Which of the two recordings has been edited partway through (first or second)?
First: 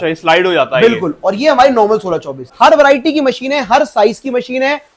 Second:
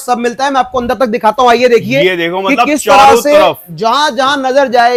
first